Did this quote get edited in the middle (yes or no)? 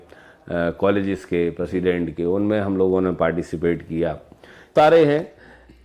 yes